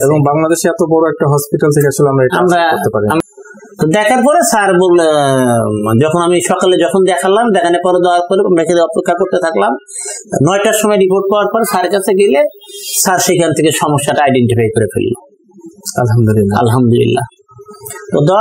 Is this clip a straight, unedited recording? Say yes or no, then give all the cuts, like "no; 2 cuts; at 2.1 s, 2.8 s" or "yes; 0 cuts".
no; 1 cut; at 3.2 s